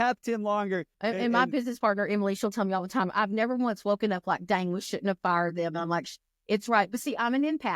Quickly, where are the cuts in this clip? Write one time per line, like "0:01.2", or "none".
0:00.9